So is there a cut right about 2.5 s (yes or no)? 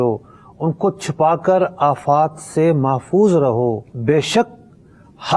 no